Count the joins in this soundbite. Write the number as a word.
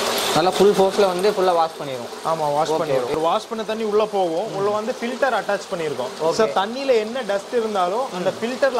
one